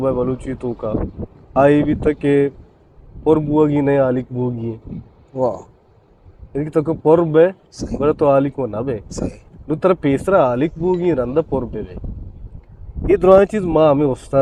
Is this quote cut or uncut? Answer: uncut